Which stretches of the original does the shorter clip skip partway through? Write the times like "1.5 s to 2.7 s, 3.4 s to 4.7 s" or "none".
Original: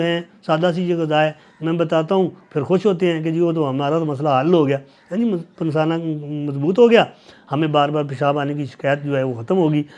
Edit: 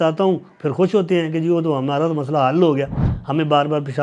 5.0 s to 7.3 s